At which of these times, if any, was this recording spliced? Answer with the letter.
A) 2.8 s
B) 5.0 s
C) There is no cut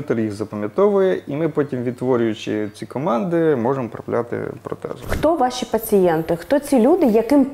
B